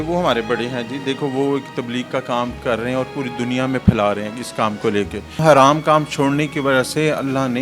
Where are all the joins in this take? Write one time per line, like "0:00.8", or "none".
0:05.4